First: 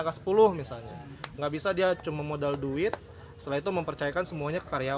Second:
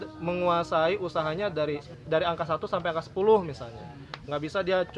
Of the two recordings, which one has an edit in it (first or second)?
second